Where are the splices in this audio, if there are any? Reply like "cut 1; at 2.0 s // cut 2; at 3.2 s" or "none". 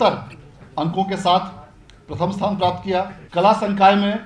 cut 1; at 3.2 s